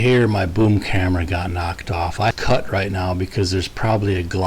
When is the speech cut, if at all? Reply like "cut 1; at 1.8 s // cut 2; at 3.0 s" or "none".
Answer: cut 1; at 2.3 s

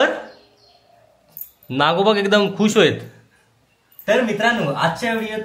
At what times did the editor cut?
cut 1; at 3.8 s

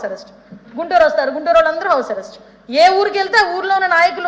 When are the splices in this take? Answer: cut 1; at 1.8 s

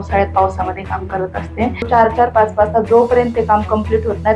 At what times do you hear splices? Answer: cut 1; at 1.9 s

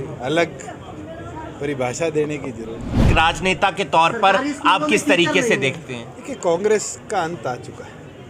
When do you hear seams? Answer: cut 1; at 3.1 s

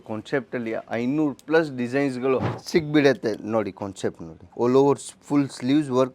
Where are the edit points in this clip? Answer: cut 1; at 2.6 s

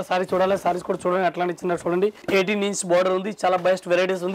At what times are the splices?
cut 1; at 2.2 s

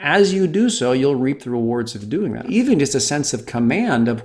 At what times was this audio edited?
cut 1; at 2.4 s

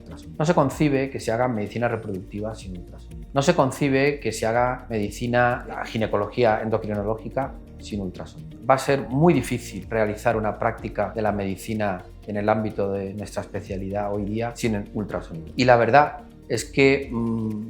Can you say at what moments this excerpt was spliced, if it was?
cut 1; at 8.4 s // cut 2; at 15.4 s

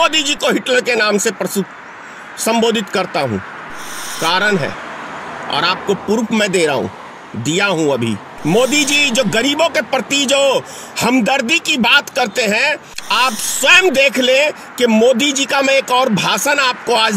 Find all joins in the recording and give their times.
cut 1; at 8.3 s // cut 2; at 12.9 s

